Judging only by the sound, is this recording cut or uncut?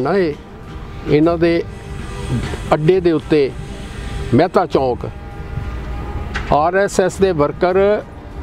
uncut